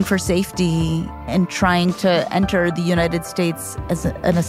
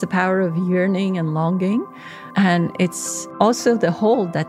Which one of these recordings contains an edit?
first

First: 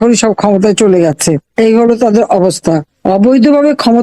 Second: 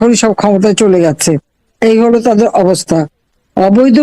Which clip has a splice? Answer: first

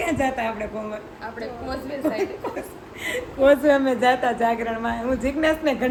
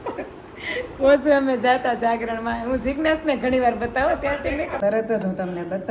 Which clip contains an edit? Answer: second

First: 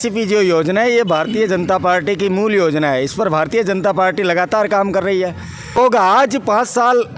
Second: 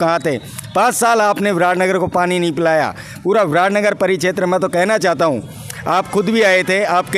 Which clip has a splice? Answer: first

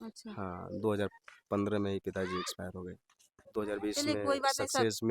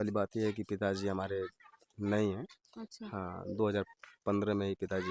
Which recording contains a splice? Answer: first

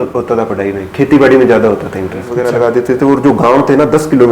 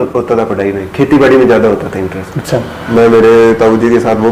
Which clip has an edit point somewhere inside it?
first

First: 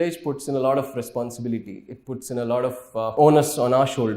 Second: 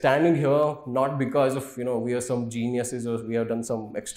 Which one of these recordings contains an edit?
first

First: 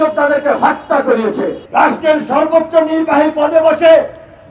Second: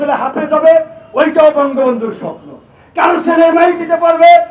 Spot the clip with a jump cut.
first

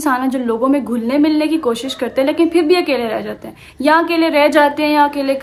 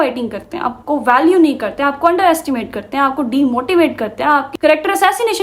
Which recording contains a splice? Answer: second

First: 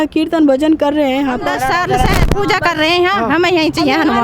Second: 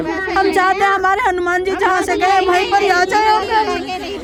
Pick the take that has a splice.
first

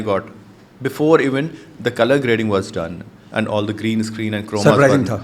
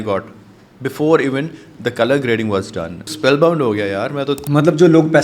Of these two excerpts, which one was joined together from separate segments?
second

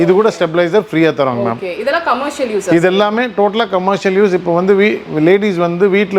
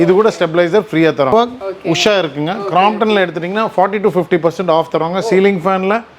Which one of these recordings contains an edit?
second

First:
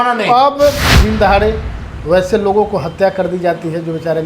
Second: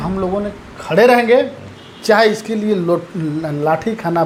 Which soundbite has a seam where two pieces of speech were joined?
first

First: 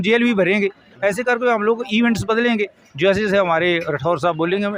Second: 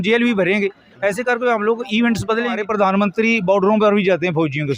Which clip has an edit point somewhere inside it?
second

